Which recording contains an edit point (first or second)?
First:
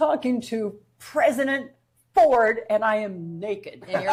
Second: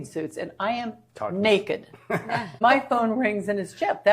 second